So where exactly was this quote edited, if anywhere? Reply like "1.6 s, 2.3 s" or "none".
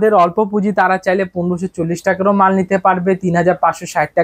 none